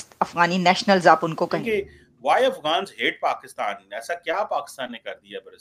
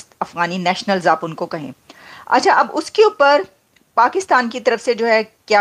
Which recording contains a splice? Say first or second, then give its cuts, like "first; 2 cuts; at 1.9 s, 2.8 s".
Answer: first; 1 cut; at 1.6 s